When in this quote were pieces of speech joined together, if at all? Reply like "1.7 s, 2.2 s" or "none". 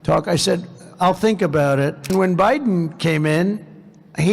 2.1 s